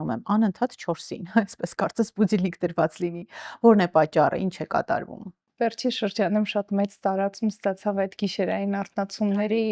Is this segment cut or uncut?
uncut